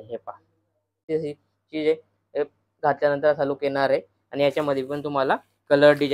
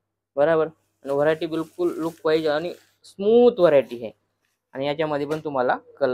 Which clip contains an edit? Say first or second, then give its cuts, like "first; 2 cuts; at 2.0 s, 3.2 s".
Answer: first; 1 cut; at 1.0 s